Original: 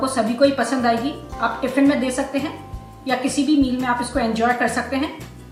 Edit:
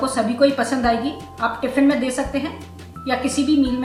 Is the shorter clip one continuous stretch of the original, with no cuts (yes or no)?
yes